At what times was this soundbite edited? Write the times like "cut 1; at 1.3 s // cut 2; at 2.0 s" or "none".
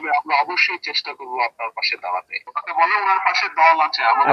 cut 1; at 2.4 s